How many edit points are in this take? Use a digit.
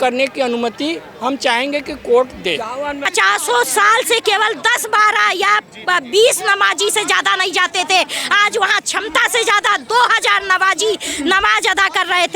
1